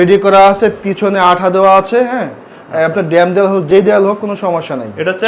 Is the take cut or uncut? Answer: uncut